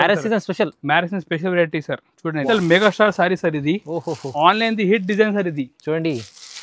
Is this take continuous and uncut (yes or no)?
no